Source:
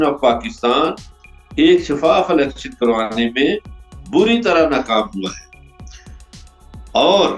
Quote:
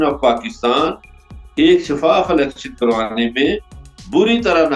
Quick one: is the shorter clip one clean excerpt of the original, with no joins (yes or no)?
yes